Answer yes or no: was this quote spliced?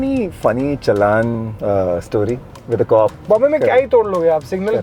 yes